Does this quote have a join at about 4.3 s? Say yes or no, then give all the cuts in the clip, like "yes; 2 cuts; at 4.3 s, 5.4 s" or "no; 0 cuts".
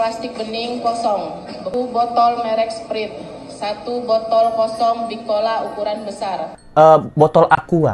no; 2 cuts; at 1.7 s, 6.6 s